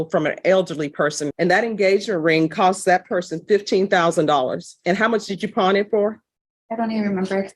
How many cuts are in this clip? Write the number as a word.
one